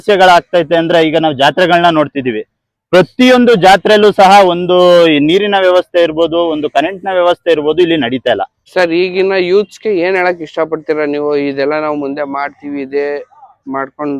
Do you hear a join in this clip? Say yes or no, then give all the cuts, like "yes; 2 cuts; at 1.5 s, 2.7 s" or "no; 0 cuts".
yes; 1 cut; at 8.6 s